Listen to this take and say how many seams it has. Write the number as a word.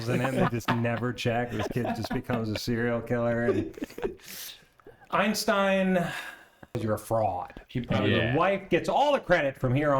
two